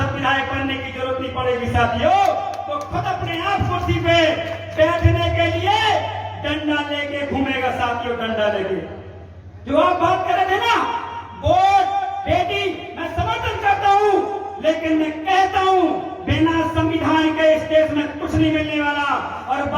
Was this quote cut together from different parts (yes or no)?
no